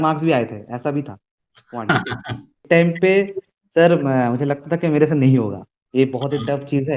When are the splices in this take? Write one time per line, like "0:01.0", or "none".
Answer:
0:02.6